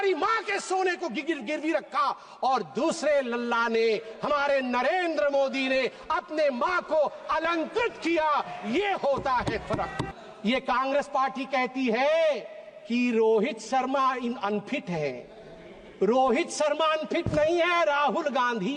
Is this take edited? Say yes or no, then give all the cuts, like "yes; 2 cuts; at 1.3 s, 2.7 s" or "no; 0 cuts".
yes; 1 cut; at 10.1 s